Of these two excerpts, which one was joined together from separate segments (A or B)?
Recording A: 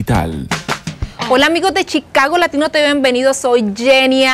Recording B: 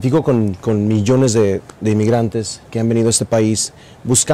B